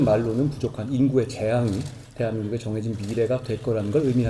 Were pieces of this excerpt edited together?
no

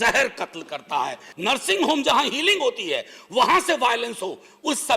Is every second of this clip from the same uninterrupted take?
no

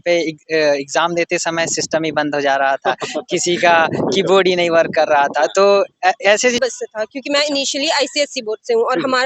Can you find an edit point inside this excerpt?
yes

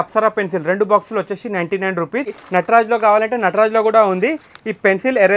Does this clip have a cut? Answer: yes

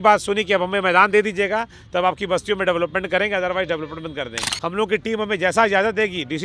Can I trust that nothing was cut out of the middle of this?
no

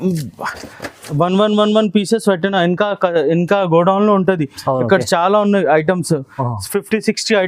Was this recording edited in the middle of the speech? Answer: no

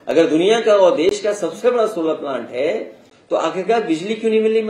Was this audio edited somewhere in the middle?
no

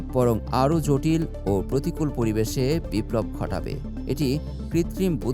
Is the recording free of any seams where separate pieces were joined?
yes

